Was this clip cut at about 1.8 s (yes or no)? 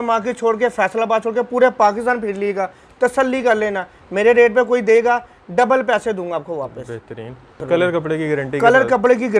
no